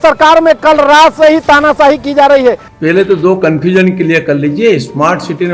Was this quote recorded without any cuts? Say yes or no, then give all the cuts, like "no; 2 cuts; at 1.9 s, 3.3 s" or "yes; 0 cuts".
no; 1 cut; at 2.7 s